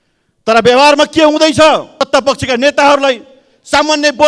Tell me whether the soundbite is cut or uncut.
cut